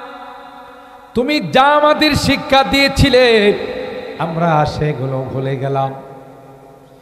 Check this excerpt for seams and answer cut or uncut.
uncut